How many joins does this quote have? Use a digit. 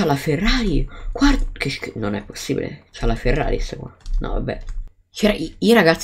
1